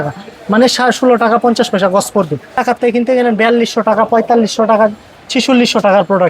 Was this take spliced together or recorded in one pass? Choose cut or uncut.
cut